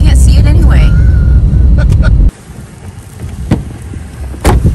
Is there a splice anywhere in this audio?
yes; 1 cut; at 2.3 s

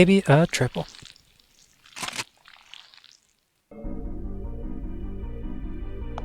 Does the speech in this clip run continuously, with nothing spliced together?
yes; 0 cuts

